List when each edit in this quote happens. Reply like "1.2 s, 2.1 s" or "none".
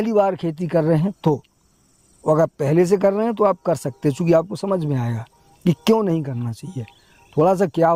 none